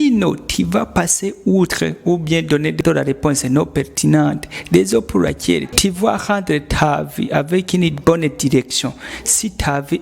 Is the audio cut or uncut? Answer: cut